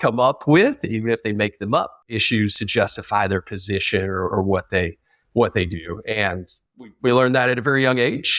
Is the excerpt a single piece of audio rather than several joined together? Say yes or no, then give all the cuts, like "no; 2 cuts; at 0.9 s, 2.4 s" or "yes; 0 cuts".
no; 1 cut; at 2.1 s